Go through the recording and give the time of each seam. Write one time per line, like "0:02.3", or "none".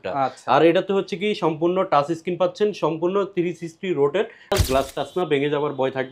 0:04.5